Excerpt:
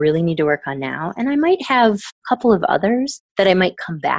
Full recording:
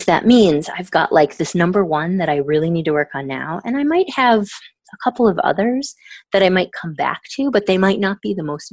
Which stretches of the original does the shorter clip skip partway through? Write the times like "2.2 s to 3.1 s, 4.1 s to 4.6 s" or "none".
4.6 s to 4.9 s, 5.9 s to 6.1 s